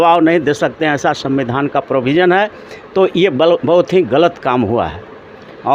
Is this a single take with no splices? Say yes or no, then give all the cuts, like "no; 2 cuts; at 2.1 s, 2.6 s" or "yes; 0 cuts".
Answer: yes; 0 cuts